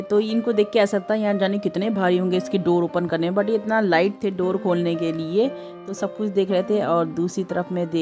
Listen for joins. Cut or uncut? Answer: uncut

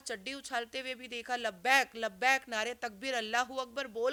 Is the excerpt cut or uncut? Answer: uncut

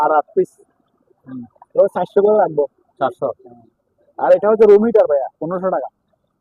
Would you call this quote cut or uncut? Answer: uncut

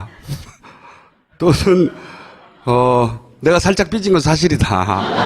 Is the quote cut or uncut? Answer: uncut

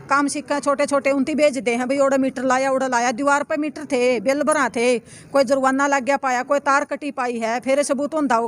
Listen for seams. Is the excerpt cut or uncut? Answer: uncut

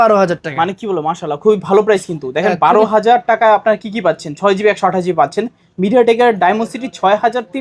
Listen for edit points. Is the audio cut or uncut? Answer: uncut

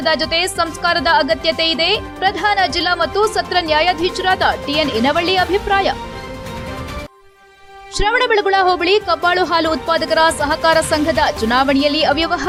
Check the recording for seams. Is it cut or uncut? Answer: uncut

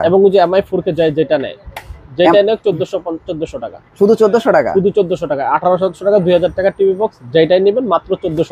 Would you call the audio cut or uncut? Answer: uncut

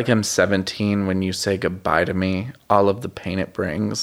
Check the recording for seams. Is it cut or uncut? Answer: uncut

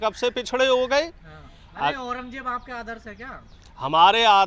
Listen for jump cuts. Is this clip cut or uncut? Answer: uncut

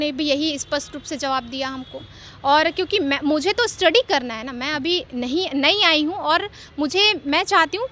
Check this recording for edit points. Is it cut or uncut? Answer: uncut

